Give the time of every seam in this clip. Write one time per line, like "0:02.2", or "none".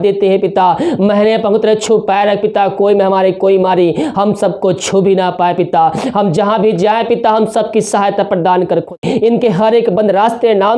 0:09.0